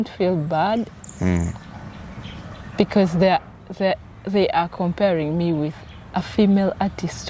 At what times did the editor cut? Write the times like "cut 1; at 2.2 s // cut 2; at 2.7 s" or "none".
none